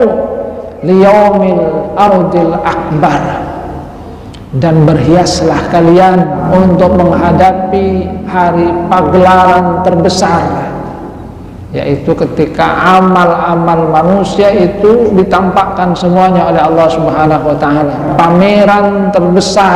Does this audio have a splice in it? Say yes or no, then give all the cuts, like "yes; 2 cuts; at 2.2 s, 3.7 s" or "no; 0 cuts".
yes; 2 cuts; at 6.4 s, 18.0 s